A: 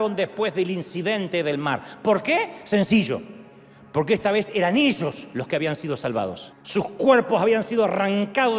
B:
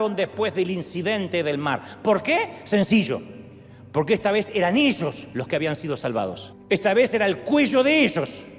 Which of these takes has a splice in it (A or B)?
A